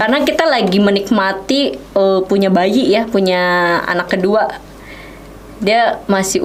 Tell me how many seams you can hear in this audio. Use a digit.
0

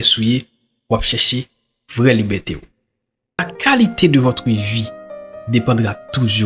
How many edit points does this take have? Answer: 1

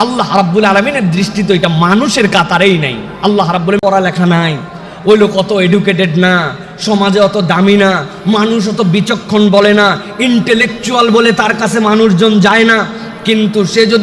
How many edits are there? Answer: 1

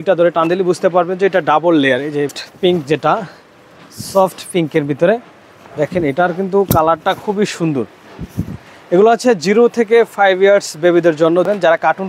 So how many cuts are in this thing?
1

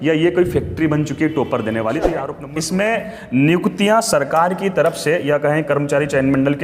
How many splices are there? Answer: 1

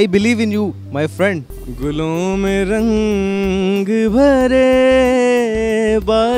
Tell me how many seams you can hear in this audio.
1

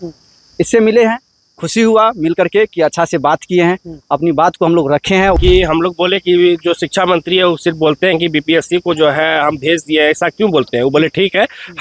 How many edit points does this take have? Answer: 1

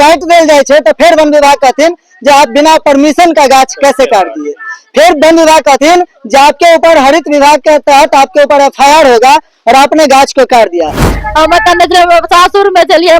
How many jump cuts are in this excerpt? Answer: 1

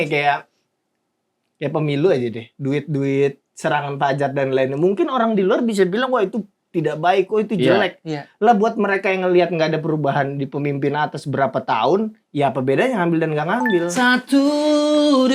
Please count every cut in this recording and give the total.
0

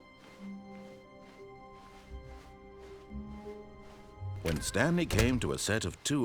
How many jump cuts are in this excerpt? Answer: 1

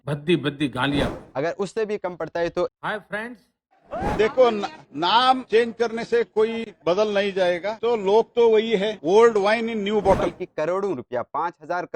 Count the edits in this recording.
3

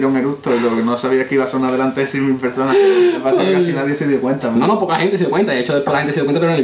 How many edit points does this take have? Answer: 0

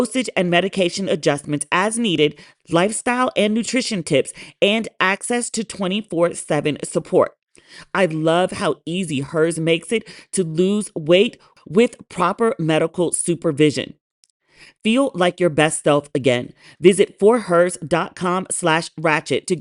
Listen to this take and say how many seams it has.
1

